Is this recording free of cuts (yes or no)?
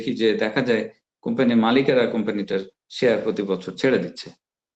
yes